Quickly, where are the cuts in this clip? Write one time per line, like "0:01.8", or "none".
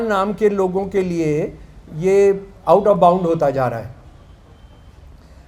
none